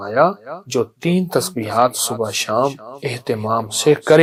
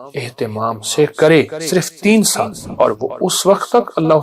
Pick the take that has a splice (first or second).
second